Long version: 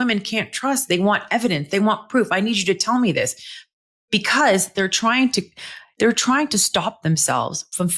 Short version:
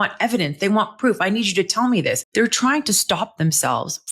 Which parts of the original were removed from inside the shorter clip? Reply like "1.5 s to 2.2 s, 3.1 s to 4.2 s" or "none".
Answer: 3.3 s to 5.9 s